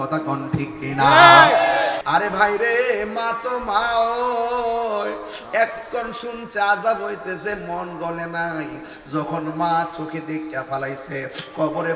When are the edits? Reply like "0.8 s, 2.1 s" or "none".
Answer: 2.0 s